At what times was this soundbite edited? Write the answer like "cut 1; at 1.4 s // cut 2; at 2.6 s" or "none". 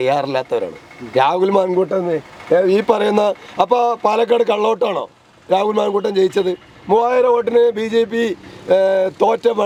none